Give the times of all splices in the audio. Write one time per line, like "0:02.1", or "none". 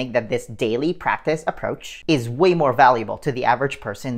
none